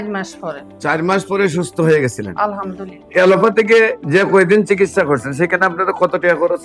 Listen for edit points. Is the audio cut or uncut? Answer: cut